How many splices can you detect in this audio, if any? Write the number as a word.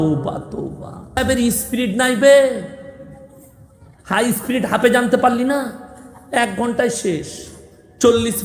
one